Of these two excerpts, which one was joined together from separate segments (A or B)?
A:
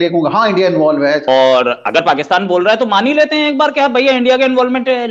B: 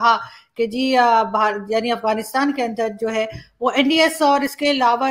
A